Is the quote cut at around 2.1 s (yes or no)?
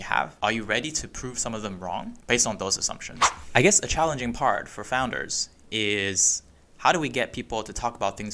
yes